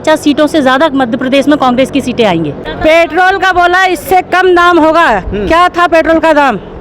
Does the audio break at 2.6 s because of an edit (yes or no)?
yes